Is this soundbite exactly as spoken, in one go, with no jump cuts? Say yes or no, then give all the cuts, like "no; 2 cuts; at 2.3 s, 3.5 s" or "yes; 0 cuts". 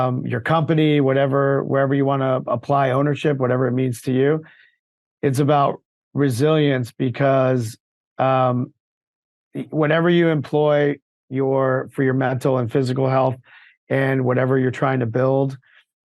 yes; 0 cuts